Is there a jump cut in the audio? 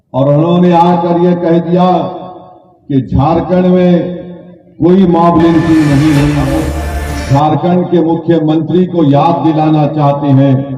yes; 1 cut; at 6.6 s

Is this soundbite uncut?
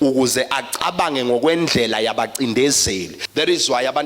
no; 1 cut; at 3.2 s

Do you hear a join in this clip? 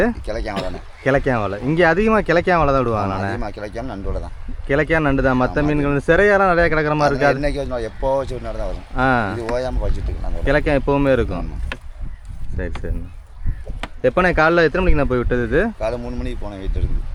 no; 0 cuts

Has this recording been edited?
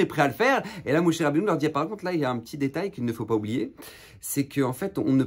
no; 0 cuts

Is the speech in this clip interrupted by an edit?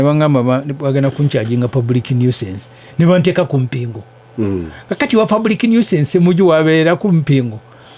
no; 0 cuts

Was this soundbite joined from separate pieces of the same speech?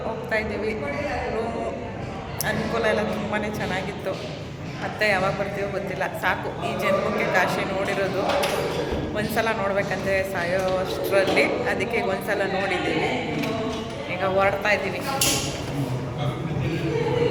no; 0 cuts

